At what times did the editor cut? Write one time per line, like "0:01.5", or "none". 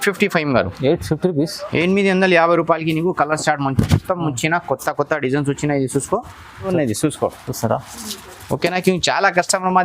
0:06.7